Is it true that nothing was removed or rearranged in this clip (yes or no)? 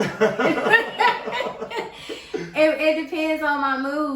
yes